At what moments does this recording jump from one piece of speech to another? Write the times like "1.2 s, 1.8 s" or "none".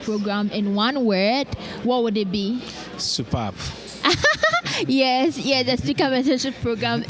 none